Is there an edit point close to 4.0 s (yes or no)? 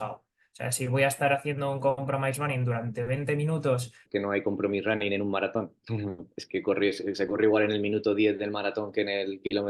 yes